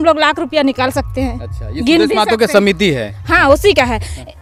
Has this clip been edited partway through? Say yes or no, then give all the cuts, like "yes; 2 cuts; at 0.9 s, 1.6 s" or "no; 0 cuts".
no; 0 cuts